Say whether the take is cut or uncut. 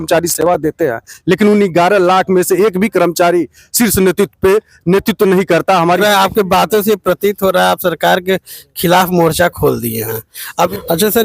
cut